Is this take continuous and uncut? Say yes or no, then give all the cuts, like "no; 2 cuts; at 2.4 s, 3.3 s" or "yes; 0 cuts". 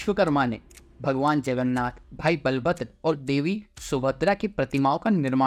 yes; 0 cuts